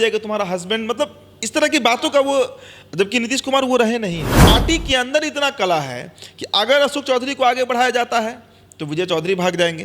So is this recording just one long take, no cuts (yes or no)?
no